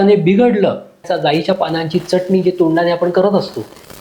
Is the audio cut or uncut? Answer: cut